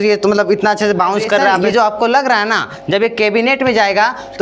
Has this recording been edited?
yes; 1 cut; at 1.6 s

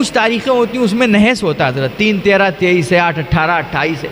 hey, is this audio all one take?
yes; 0 cuts

